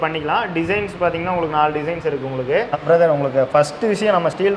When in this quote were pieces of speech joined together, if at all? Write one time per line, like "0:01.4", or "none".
0:02.8